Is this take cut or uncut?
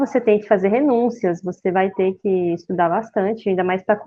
uncut